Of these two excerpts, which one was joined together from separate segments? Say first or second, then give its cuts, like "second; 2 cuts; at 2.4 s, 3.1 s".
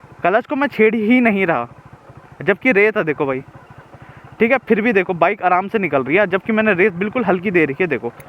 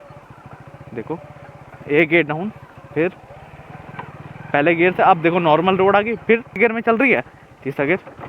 second; 1 cut; at 6.6 s